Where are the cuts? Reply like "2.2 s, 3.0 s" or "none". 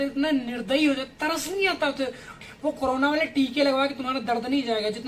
2.5 s